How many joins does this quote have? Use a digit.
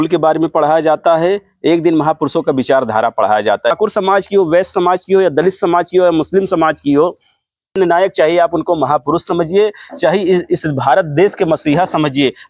2